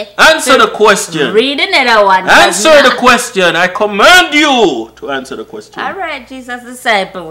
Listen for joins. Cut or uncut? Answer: uncut